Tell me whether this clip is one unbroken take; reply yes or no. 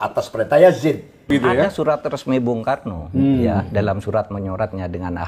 no